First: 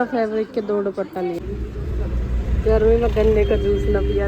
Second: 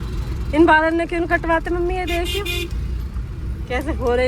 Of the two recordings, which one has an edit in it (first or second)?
first